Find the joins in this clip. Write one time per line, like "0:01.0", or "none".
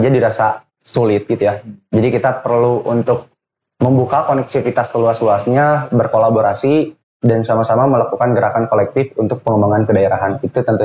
none